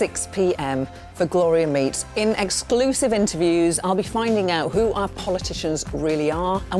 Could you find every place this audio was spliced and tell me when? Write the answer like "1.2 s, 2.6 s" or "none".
none